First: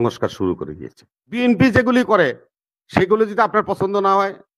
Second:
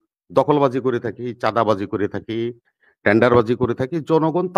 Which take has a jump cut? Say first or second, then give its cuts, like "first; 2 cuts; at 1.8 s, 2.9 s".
first; 1 cut; at 1.4 s